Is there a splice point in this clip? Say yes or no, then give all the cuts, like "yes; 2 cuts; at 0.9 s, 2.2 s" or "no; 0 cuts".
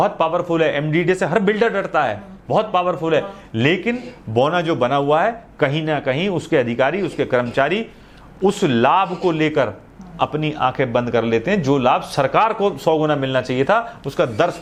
no; 0 cuts